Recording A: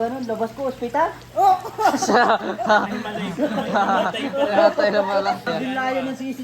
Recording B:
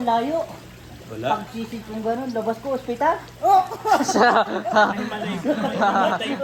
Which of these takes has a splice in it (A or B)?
A